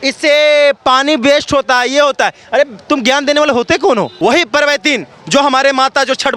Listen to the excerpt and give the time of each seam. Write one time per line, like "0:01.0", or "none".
0:04.1